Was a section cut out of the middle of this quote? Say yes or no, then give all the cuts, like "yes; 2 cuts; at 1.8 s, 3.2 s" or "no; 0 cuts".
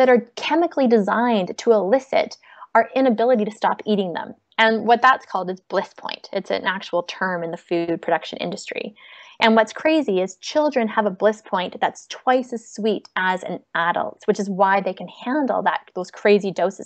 no; 0 cuts